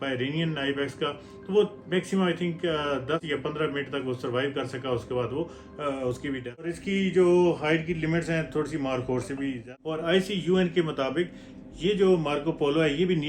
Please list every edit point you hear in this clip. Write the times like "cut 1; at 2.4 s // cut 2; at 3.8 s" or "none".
cut 1; at 3.2 s // cut 2; at 6.7 s // cut 3; at 9.6 s